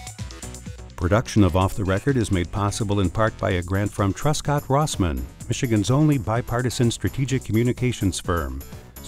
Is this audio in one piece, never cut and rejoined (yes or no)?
no